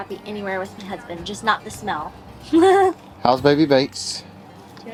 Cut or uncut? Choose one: uncut